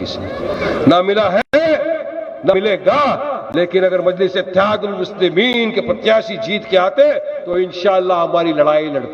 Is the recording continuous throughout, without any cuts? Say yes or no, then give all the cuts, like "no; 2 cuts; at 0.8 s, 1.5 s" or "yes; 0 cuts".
yes; 0 cuts